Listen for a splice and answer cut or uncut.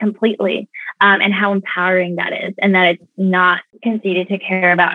cut